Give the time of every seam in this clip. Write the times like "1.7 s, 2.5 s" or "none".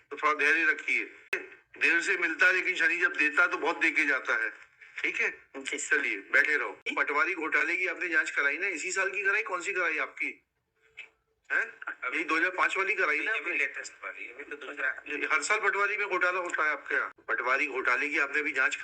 1.4 s, 6.9 s, 17.1 s